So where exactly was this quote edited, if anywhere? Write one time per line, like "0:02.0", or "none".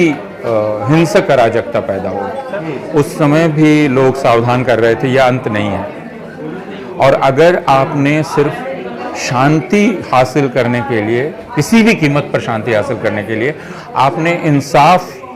0:02.6